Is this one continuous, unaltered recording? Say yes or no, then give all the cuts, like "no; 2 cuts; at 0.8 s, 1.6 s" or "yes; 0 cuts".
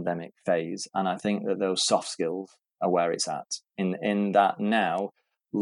yes; 0 cuts